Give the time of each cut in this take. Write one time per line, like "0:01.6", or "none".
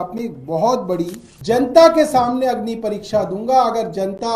0:01.3